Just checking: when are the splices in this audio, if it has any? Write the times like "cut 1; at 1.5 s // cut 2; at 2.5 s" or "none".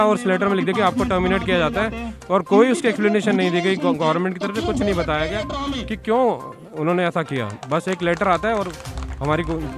none